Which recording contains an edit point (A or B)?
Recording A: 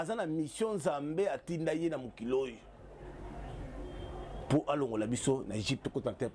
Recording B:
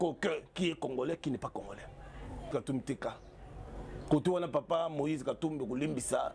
B